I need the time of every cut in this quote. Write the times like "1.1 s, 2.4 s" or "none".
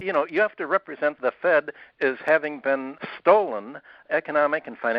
1.2 s, 2.9 s, 4.0 s

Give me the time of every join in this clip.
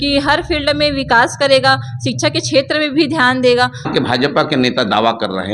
3.9 s

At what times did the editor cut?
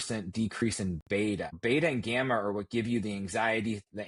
1.6 s

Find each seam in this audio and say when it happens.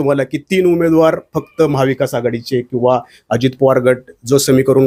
none

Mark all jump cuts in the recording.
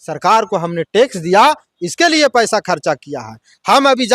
none

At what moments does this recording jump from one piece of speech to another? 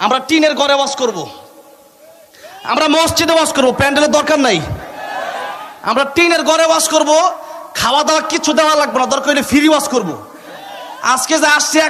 none

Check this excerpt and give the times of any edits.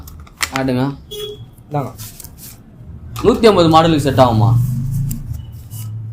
none

